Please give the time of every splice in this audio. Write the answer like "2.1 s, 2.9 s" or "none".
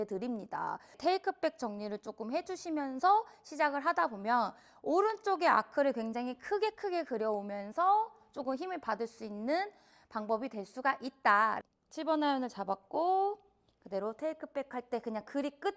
0.9 s, 11.6 s